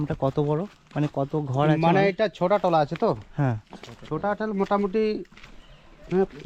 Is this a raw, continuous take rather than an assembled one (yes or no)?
yes